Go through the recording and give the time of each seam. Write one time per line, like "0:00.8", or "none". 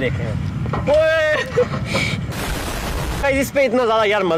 none